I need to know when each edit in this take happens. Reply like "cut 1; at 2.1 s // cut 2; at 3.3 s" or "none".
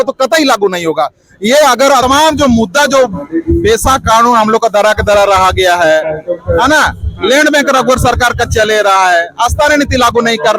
cut 1; at 2.0 s